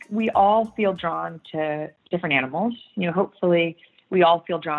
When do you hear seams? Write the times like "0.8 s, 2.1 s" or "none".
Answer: 2.0 s

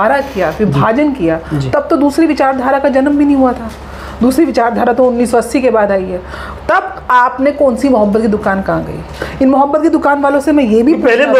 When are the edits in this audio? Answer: none

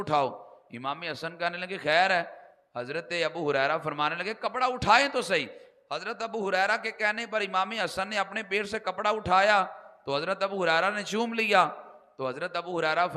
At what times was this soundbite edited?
none

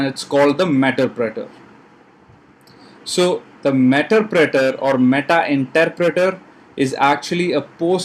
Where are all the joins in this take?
none

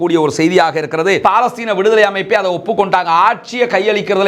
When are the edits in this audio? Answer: 1.2 s

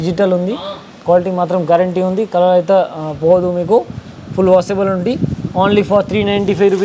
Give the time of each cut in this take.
none

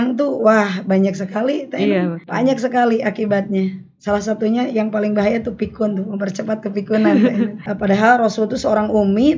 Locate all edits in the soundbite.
2.2 s, 7.7 s

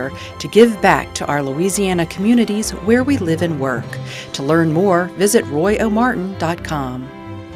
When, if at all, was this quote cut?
none

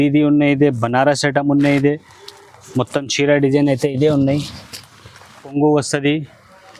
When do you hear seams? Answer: 5.5 s

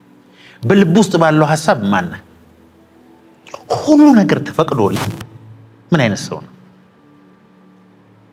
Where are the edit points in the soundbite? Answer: none

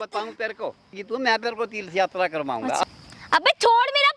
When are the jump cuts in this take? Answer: 1.0 s, 2.8 s

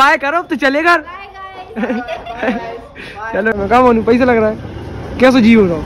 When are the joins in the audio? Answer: 3.6 s

